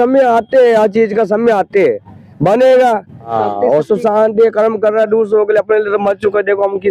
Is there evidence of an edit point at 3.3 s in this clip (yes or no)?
yes